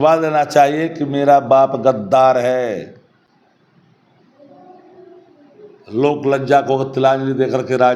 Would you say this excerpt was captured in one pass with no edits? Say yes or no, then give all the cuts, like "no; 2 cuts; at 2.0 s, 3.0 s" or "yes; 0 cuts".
yes; 0 cuts